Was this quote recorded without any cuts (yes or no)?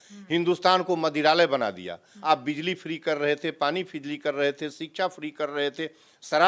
no